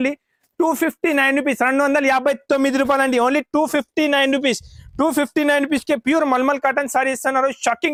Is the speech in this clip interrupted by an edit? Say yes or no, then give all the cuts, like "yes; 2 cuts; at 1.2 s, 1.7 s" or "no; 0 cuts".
no; 0 cuts